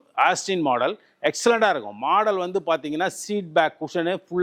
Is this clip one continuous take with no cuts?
yes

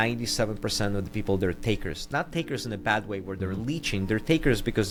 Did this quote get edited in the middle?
no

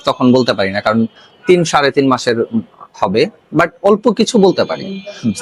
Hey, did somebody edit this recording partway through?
no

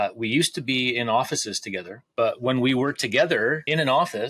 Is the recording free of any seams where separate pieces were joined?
no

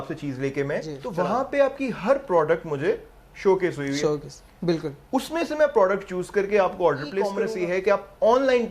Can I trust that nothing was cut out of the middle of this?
no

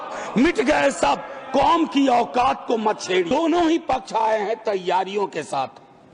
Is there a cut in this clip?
yes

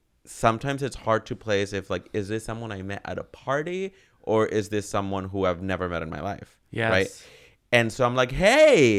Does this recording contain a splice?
no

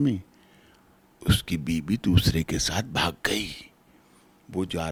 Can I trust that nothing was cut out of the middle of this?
yes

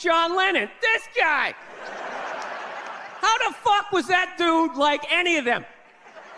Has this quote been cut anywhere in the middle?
no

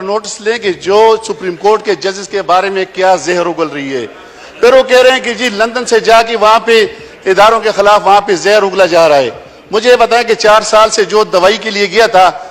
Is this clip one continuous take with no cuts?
yes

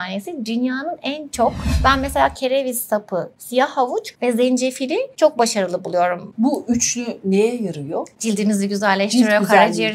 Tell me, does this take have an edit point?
yes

